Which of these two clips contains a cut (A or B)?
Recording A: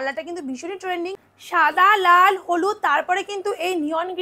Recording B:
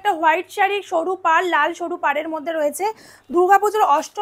A